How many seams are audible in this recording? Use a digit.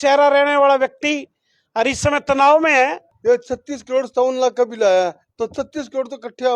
1